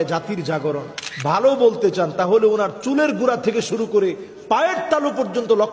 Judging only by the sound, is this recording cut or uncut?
cut